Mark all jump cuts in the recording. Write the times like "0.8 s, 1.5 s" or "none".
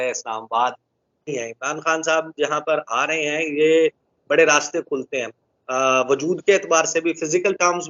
1.3 s